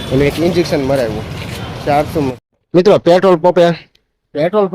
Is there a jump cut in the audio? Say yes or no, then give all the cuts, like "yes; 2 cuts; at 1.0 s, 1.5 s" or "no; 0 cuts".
yes; 1 cut; at 2.1 s